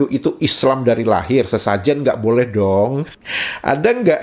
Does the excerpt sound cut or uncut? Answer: cut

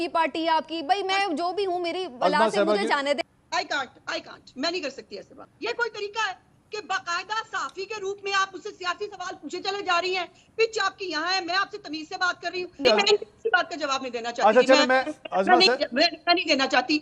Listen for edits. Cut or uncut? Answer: cut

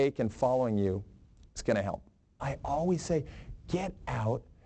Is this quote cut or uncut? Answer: cut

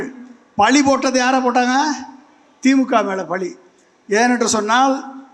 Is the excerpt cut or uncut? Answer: uncut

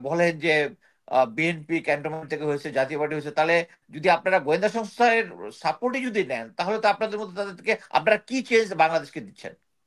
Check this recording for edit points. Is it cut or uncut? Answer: uncut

